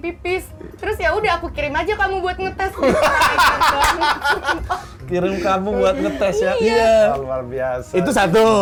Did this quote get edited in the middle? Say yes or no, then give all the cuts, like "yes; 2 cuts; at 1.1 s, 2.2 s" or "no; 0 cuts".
no; 0 cuts